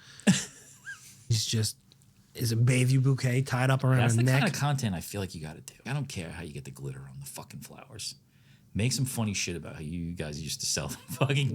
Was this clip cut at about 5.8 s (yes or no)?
yes